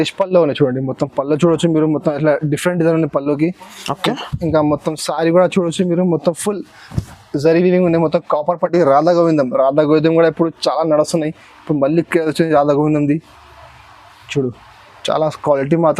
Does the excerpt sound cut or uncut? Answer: cut